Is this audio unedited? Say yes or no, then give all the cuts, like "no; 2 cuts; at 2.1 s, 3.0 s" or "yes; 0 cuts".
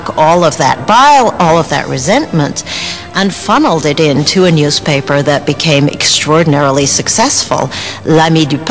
no; 1 cut; at 7.6 s